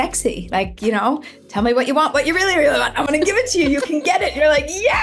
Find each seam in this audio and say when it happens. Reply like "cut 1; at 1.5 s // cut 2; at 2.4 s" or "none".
none